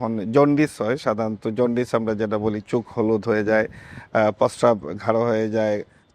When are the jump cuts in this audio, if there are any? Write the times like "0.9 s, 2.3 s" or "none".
none